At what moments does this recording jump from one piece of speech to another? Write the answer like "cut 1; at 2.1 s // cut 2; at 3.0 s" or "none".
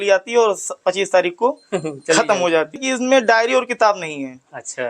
cut 1; at 2.8 s